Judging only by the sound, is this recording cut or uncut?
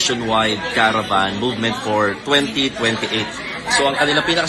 uncut